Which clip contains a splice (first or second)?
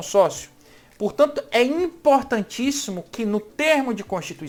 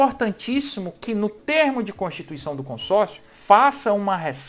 second